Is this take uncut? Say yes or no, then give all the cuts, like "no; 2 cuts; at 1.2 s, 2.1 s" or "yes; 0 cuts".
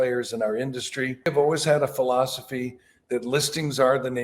no; 1 cut; at 1.3 s